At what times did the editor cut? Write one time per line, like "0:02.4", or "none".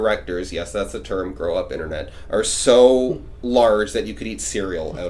none